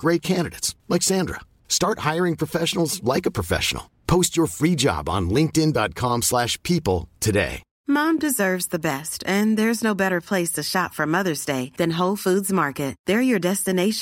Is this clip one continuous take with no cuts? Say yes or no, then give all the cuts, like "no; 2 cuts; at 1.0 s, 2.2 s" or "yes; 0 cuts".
no; 1 cut; at 7.7 s